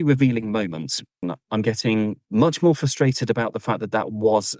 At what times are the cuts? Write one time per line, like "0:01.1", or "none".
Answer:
0:01.2
0:02.2